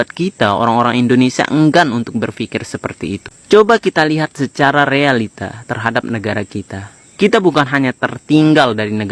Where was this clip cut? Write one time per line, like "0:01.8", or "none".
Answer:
none